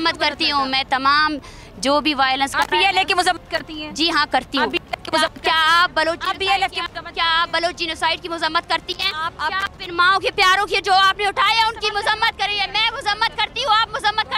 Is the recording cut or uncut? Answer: uncut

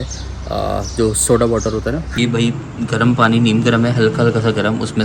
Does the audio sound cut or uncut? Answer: cut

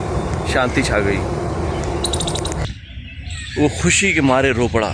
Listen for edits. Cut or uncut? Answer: cut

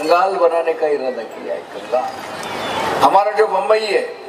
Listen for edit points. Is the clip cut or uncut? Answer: cut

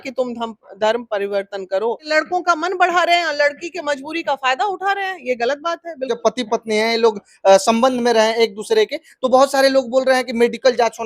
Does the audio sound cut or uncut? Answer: cut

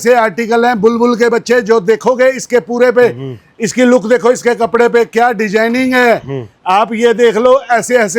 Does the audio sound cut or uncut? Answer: uncut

